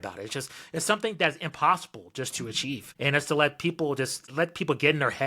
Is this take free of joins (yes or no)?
no